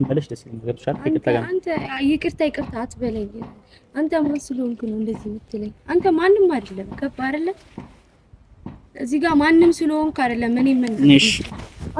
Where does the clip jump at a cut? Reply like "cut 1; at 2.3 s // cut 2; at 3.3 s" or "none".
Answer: none